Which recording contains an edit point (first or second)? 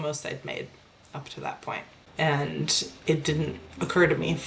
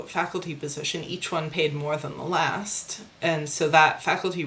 first